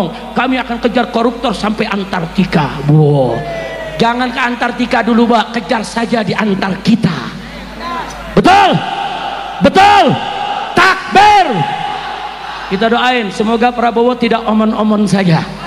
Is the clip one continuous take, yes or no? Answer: yes